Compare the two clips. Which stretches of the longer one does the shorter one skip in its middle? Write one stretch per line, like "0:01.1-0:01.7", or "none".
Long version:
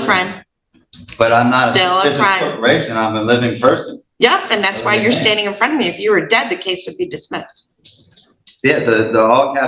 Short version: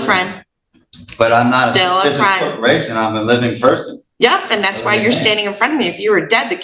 none